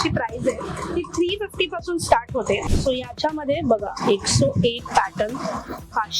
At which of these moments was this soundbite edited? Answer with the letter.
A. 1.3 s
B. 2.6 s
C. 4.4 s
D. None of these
B